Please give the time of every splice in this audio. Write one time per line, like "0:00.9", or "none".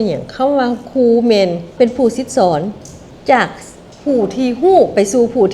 0:01.7